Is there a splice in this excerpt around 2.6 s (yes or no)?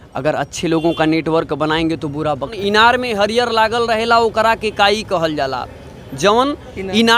yes